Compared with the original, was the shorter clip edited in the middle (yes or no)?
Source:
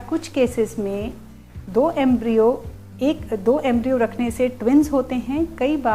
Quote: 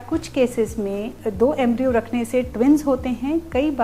yes